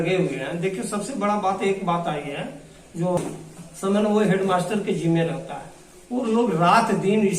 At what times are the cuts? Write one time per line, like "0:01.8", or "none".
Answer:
0:03.2